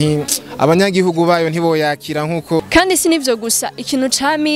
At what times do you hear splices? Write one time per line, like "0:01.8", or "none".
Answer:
0:02.6